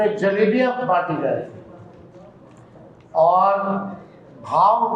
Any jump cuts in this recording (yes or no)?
no